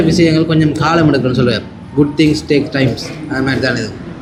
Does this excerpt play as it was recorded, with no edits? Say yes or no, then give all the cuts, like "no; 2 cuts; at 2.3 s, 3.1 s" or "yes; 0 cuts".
yes; 0 cuts